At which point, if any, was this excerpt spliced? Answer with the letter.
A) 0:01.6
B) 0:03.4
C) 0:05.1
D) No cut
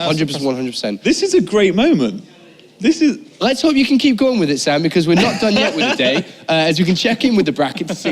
C